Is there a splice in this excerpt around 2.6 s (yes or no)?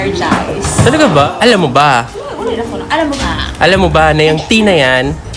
no